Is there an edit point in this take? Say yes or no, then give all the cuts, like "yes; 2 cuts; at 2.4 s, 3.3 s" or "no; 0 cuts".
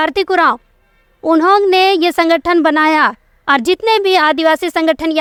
no; 0 cuts